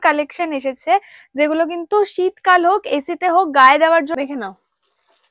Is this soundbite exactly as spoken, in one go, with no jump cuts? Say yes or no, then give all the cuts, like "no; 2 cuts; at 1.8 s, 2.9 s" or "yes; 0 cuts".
no; 1 cut; at 4.1 s